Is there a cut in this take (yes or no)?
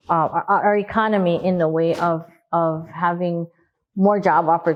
no